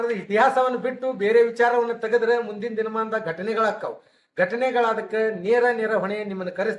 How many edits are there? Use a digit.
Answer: 0